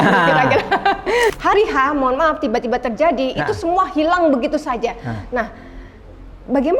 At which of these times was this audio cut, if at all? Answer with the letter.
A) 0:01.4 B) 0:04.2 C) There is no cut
A